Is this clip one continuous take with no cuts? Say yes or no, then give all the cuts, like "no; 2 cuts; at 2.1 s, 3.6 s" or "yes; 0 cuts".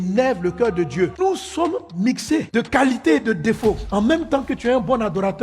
no; 1 cut; at 1.1 s